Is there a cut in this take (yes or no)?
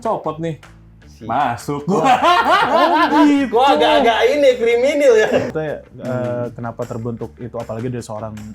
yes